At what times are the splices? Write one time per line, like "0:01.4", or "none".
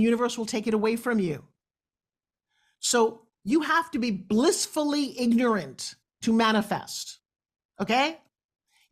none